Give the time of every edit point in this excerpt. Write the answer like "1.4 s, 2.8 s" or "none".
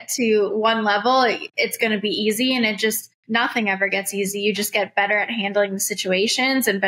3.1 s